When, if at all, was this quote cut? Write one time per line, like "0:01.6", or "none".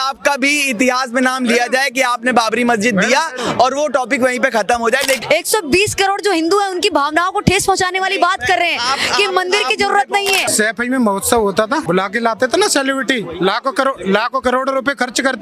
0:05.2
0:10.5
0:11.8

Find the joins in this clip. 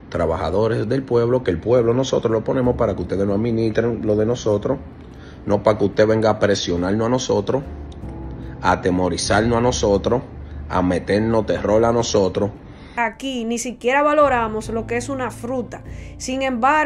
0:13.0

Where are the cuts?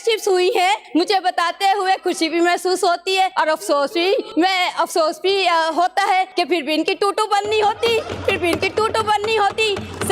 0:00.8
0:03.3
0:04.3
0:06.3

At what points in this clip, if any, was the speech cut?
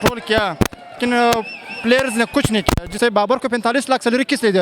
0:03.0

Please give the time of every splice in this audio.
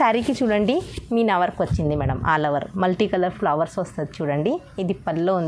none

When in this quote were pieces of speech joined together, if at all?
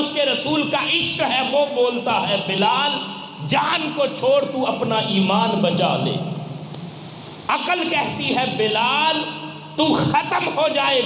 none

